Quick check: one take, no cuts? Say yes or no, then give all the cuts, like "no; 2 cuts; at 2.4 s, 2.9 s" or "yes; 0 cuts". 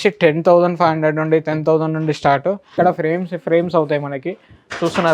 no; 1 cut; at 2.6 s